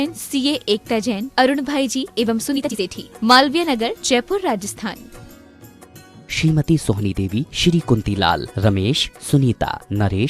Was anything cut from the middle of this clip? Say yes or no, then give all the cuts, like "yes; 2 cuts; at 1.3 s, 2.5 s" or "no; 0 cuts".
yes; 1 cut; at 2.6 s